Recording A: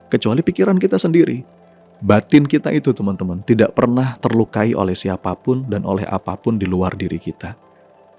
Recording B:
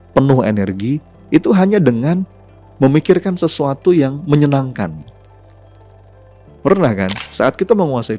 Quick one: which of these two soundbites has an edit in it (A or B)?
B